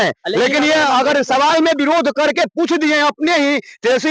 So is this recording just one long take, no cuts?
yes; 0 cuts

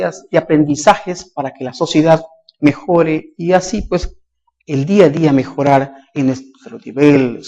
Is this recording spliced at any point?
no; 0 cuts

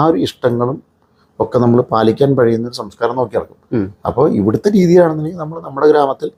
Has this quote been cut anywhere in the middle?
no; 0 cuts

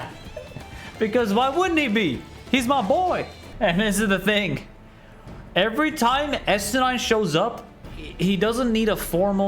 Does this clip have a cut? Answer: yes; 1 cut; at 3.4 s

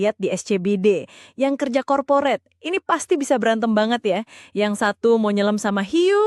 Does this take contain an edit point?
no; 0 cuts

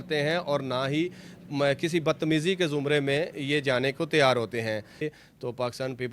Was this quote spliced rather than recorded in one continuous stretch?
yes; 1 cut; at 5.0 s

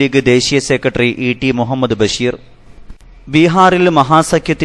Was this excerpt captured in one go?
yes; 0 cuts

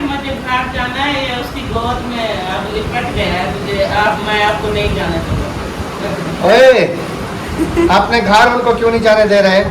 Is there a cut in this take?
no; 0 cuts

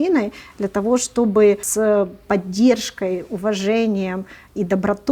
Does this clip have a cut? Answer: yes; 1 cut; at 1.7 s

